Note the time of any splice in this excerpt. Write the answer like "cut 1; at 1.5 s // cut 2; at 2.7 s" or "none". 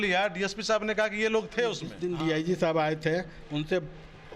cut 1; at 1.9 s